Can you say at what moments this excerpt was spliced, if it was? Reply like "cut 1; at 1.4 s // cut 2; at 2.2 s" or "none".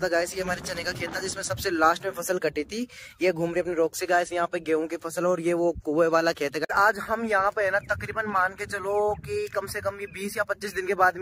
cut 1; at 6.7 s

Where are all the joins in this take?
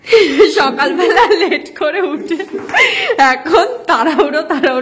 none

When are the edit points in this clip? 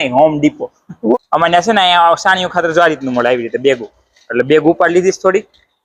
cut 1; at 1.1 s

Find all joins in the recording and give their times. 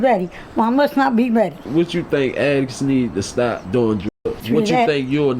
cut 1; at 1.7 s // cut 2; at 4.4 s

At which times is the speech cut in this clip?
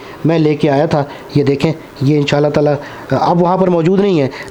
none

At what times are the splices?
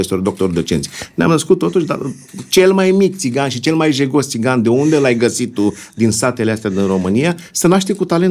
none

